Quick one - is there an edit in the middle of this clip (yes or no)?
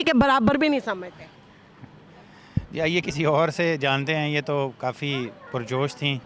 no